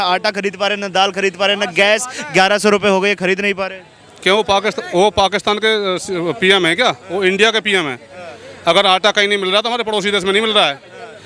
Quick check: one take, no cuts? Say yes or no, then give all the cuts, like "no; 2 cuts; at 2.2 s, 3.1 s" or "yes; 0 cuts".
yes; 0 cuts